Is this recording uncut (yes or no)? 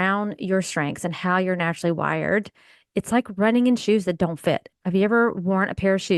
yes